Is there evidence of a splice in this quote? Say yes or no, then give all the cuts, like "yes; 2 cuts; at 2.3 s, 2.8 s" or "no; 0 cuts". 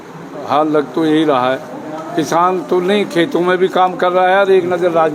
no; 0 cuts